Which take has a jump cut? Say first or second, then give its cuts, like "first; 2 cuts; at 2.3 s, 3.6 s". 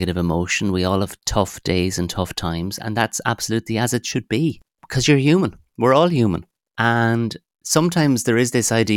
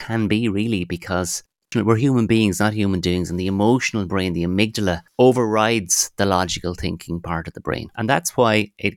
second; 3 cuts; at 1.7 s, 5.0 s, 7.9 s